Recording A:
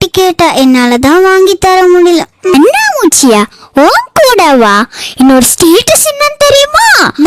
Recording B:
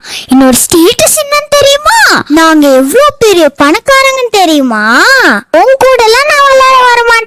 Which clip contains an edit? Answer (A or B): A